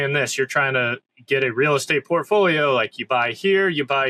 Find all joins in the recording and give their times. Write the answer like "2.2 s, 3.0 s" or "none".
none